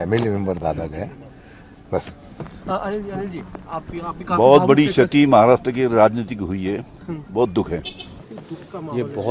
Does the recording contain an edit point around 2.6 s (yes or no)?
no